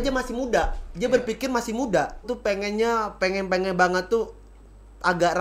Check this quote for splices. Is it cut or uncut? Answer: cut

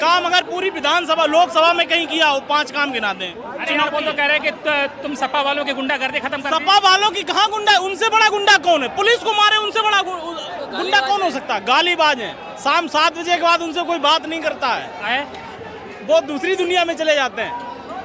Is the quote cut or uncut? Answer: uncut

